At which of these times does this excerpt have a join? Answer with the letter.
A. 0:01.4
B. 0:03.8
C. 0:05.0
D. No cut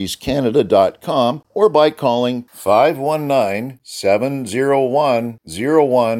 A